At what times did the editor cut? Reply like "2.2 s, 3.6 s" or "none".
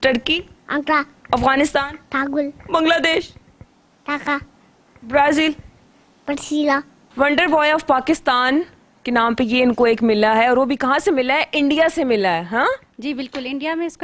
7.0 s